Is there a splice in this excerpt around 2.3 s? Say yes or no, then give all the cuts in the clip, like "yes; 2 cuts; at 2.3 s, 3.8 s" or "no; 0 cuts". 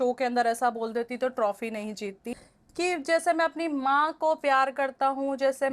yes; 1 cut; at 2.3 s